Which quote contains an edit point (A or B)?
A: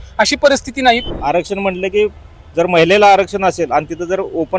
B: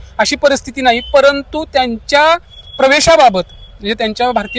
A